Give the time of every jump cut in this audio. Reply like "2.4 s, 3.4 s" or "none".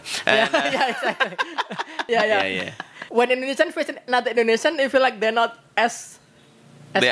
2.0 s